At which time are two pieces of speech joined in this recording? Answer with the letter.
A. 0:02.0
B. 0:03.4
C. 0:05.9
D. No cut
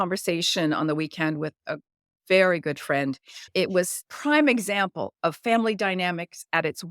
B